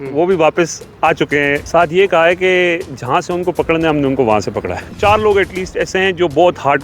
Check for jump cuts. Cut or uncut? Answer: cut